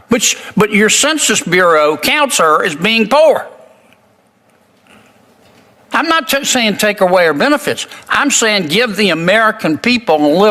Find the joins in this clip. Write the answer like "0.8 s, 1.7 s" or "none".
none